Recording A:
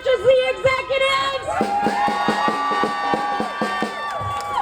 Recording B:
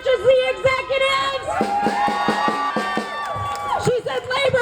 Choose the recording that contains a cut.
B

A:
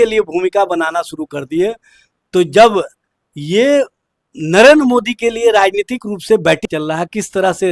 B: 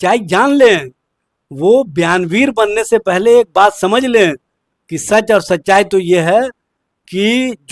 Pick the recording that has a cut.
A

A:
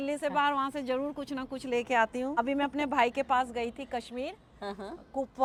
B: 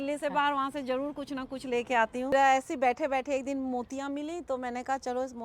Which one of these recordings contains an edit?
B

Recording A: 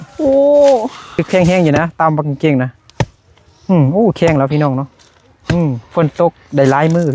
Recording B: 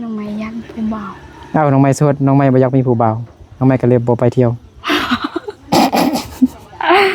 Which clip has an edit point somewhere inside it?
A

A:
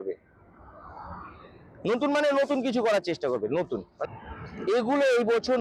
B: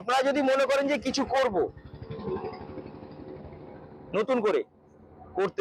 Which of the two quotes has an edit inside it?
A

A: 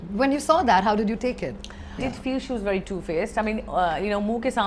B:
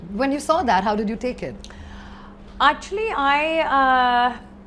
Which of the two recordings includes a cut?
A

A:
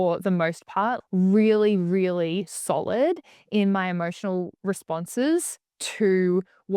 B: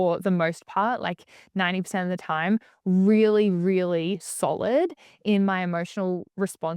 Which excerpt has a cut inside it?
A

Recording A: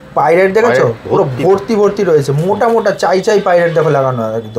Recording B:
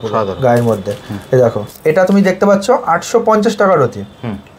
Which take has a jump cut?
B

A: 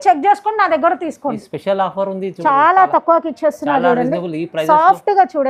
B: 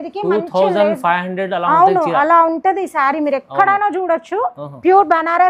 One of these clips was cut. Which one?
A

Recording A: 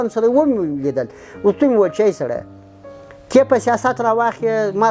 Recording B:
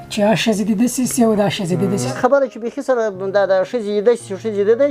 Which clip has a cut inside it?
B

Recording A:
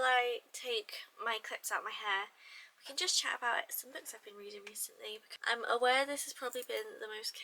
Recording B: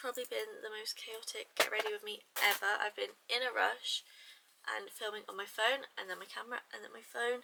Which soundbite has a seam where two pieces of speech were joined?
A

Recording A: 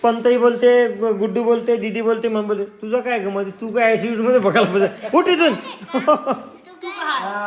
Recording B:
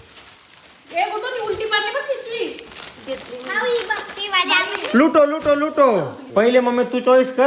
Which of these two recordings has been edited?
B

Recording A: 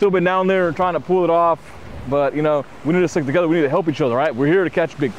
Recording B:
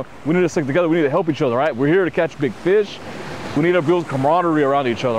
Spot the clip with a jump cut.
B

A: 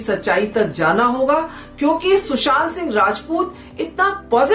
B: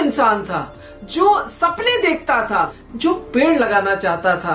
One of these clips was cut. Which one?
B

